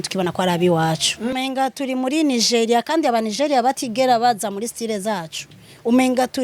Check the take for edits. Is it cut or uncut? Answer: cut